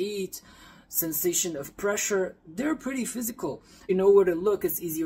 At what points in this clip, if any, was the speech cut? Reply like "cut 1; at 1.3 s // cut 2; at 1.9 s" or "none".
cut 1; at 3.4 s